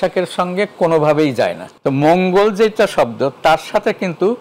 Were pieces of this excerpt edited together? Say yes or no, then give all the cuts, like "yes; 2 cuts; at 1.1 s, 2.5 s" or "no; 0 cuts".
yes; 1 cut; at 1.7 s